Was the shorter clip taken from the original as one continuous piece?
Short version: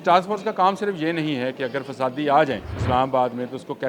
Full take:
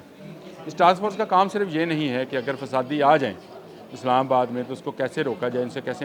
no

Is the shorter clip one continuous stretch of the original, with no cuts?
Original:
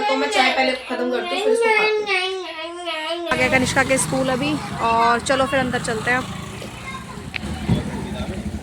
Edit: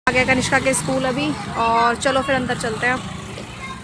yes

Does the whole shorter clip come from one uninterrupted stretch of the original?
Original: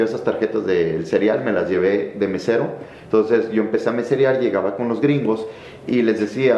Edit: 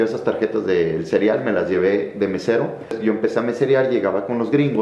no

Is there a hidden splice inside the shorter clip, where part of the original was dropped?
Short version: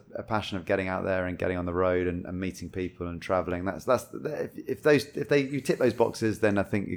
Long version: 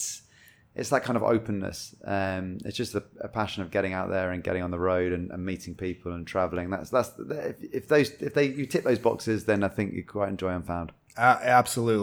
no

